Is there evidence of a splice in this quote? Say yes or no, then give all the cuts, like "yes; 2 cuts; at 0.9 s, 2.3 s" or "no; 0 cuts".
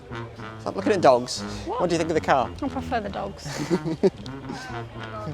yes; 1 cut; at 2.5 s